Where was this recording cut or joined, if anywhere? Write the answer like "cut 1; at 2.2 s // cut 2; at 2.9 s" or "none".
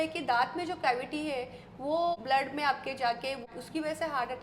cut 1; at 2.2 s // cut 2; at 3.5 s

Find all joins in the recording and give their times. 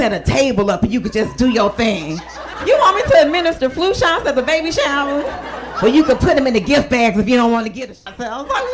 cut 1; at 7.8 s

